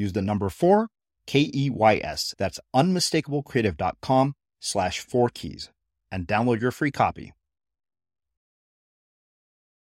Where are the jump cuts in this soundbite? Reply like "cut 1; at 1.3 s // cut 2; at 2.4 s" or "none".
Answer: none